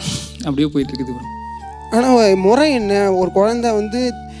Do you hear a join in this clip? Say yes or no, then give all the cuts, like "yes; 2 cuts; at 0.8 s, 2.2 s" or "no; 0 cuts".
yes; 1 cut; at 1.6 s